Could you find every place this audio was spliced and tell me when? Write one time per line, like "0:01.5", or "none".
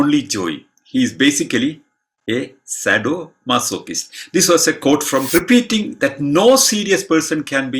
0:05.3